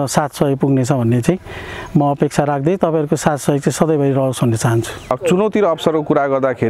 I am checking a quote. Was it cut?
yes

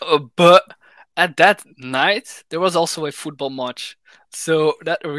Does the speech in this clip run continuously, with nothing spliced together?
yes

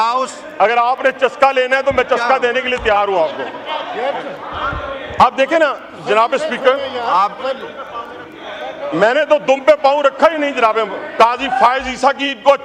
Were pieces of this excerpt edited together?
yes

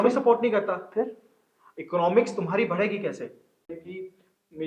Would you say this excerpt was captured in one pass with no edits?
no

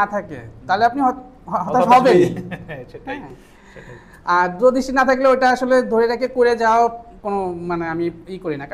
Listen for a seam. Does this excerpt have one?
no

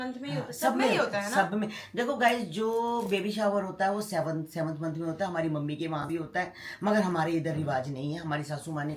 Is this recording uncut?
yes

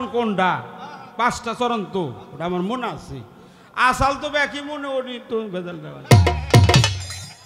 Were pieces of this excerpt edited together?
no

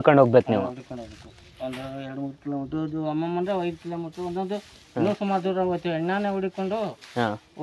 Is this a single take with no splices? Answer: yes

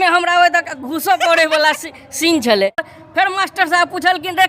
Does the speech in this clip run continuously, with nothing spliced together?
no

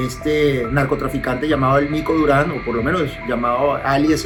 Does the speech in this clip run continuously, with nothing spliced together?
yes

